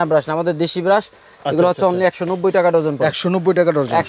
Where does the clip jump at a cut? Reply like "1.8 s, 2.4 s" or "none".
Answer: none